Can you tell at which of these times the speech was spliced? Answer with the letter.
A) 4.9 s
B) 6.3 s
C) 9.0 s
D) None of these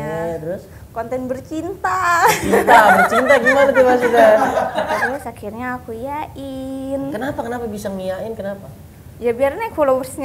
A